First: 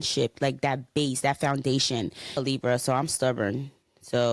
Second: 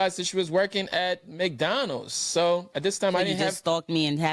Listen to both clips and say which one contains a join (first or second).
first